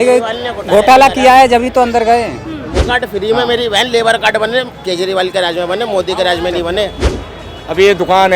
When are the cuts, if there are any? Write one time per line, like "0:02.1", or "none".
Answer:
0:02.8
0:07.0

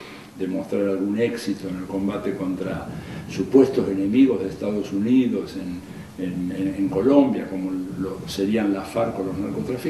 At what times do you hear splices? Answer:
none

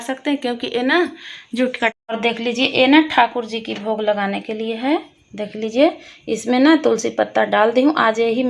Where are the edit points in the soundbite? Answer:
0:02.1

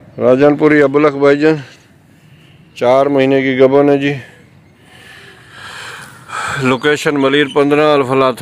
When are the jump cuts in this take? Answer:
none

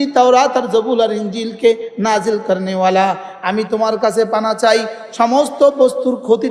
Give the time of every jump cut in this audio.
none

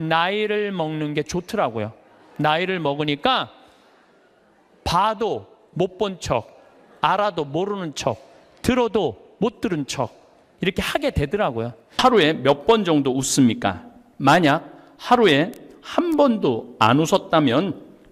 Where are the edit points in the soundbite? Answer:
0:12.0

